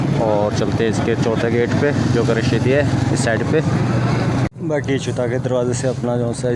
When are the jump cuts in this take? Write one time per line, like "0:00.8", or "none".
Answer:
none